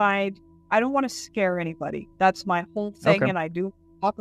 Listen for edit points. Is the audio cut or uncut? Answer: uncut